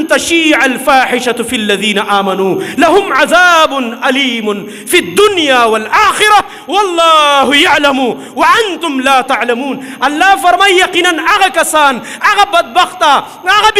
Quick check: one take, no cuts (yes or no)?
yes